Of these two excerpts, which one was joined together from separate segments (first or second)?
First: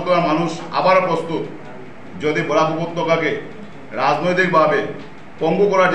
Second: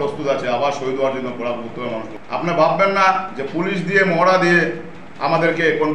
second